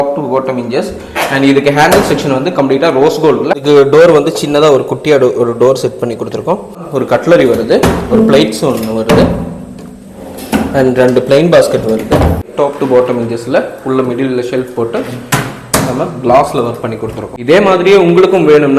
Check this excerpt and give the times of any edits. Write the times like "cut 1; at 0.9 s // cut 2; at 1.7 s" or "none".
cut 1; at 3.6 s // cut 2; at 6.8 s // cut 3; at 12.5 s // cut 4; at 17.3 s